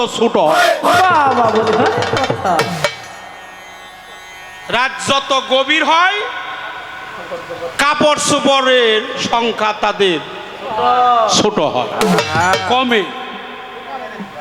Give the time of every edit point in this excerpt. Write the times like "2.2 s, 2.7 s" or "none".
none